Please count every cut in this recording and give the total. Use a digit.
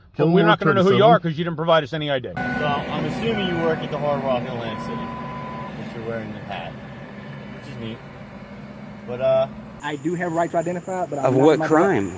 2